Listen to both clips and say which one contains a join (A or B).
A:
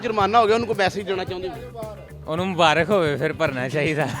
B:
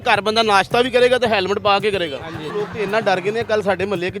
B